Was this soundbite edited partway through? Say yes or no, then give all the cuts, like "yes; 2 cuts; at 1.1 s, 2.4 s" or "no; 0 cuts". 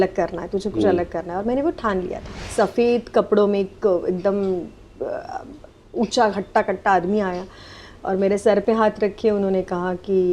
yes; 1 cut; at 2.5 s